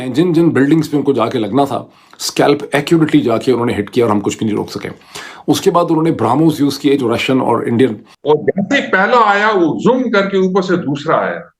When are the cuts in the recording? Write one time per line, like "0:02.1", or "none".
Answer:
0:08.1